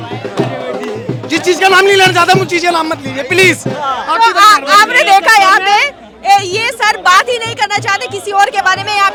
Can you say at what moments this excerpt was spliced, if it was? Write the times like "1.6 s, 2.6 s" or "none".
none